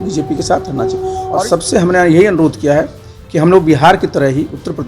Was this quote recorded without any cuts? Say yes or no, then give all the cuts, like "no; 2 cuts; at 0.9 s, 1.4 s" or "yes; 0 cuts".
no; 1 cut; at 1.2 s